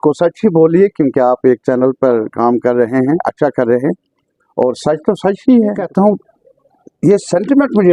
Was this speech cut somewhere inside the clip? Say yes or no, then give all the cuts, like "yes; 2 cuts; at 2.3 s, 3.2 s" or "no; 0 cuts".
yes; 1 cut; at 5.8 s